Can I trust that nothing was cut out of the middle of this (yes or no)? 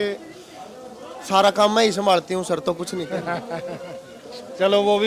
yes